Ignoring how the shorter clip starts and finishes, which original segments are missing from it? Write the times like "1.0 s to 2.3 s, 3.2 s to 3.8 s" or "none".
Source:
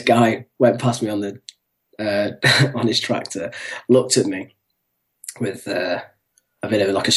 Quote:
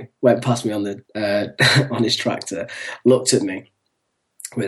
1.4 s to 1.9 s

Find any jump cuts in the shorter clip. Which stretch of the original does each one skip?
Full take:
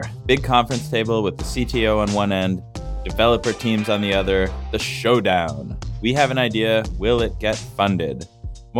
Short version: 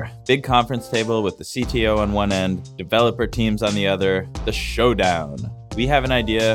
2.7 s to 3.0 s

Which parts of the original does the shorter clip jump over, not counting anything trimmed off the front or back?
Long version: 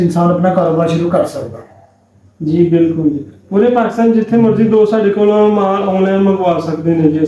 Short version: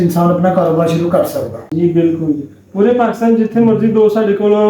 1.6 s to 2.4 s

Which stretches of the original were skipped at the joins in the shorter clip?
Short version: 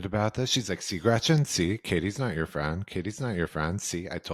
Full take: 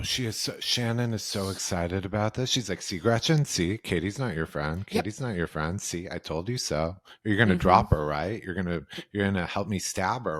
none

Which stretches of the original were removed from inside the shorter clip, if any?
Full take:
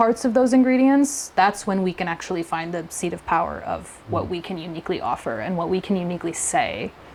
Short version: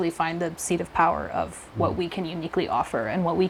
none

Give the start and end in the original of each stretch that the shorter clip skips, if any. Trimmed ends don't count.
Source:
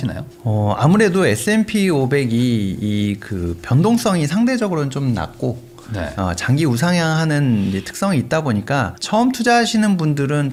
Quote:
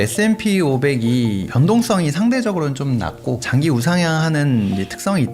2.7 s to 3.6 s, 5.6 s to 6.4 s

